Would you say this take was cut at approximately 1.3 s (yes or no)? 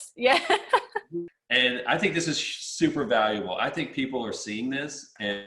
yes